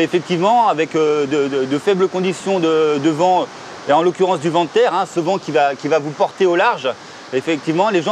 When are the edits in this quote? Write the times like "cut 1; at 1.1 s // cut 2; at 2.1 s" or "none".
none